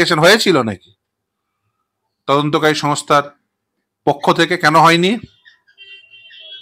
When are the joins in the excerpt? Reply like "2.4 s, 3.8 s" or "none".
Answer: none